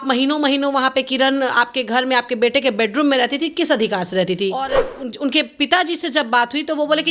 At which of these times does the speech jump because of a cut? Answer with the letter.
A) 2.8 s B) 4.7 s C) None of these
B